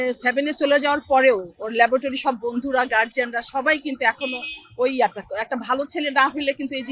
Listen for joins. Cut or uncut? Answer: uncut